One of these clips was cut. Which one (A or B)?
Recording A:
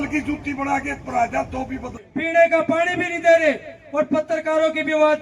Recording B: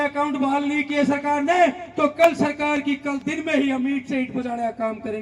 A